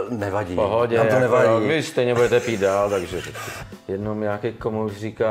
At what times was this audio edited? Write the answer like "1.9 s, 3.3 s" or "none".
3.5 s

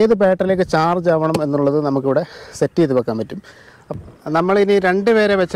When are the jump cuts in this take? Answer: 3.8 s

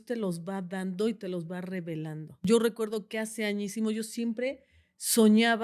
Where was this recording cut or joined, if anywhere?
2.4 s

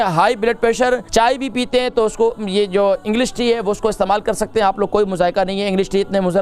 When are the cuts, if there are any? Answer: 1.1 s

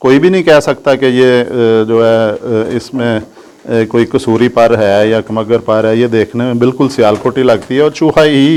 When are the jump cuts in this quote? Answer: none

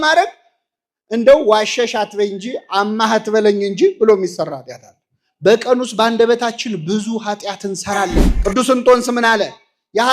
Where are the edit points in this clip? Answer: 8.3 s

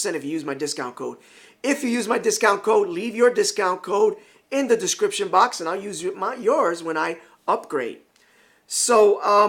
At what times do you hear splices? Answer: 5.6 s

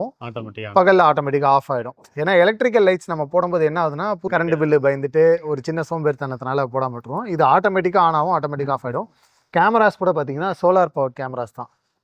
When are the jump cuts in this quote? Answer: 4.2 s

